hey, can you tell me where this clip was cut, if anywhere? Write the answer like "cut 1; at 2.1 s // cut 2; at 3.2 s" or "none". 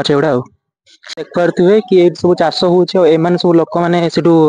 cut 1; at 1.2 s